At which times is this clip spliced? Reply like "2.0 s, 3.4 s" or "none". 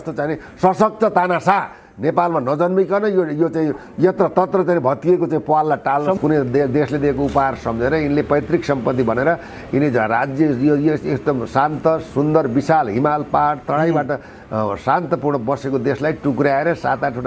6.2 s